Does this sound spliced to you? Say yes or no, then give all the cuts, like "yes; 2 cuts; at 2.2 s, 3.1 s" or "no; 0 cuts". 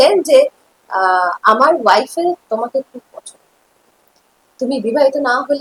no; 0 cuts